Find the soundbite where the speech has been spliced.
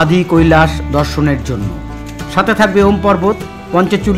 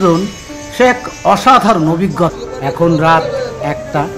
second; 1 cut; at 2.5 s

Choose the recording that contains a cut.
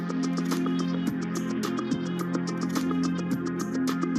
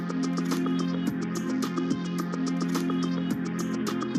first; 1 cut; at 1.2 s

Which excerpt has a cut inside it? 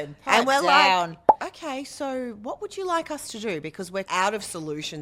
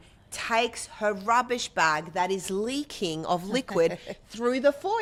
first; 1 cut; at 4.1 s

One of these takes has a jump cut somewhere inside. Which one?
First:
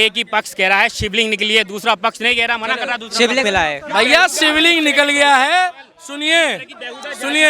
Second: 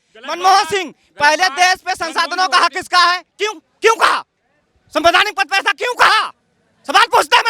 first; 1 cut; at 3.4 s

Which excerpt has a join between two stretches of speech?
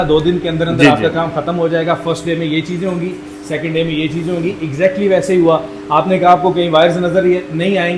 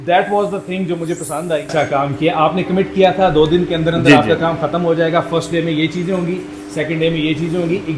second; 1 cut; at 1.7 s

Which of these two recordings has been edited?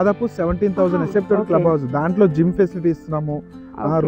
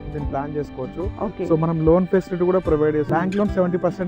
second; 1 cut; at 3.1 s

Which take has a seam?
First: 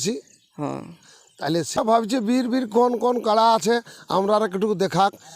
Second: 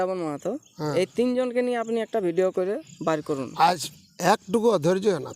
first; 1 cut; at 1.8 s

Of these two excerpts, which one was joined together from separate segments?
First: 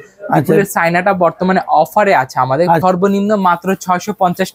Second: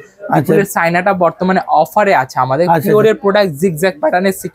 first; 1 cut; at 2.8 s

